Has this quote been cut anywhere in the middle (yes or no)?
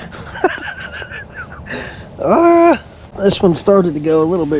no